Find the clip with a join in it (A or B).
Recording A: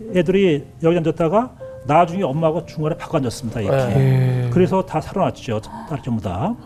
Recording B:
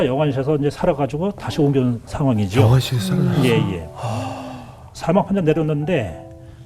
B